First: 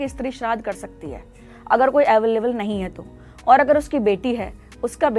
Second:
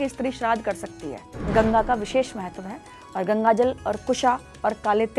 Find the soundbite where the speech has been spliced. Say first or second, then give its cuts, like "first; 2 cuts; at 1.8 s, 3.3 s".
second; 1 cut; at 1.3 s